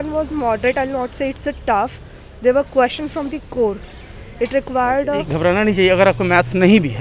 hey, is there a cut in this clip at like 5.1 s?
yes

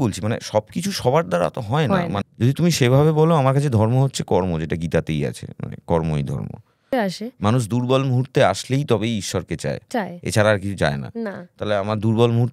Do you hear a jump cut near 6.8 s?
yes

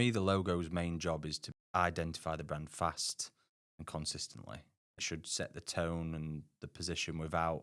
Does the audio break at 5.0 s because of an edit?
yes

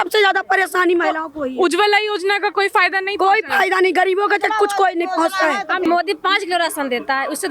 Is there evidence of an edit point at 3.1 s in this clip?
no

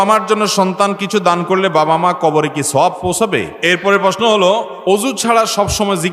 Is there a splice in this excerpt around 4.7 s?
yes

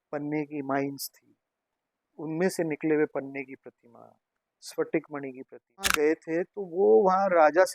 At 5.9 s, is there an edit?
yes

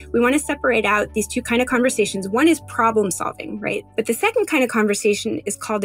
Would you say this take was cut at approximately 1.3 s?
no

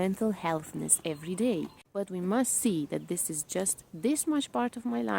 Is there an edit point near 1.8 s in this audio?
yes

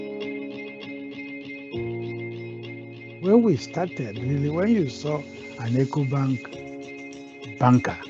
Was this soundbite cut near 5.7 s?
no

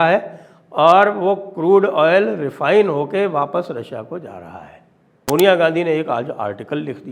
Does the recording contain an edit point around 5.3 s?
yes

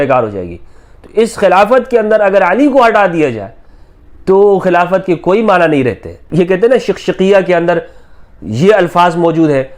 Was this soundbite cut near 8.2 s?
no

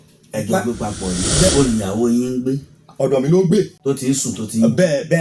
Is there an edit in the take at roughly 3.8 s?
yes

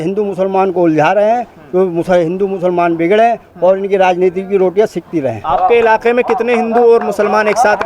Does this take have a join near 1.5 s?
no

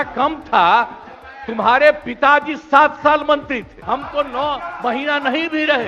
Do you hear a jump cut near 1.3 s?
no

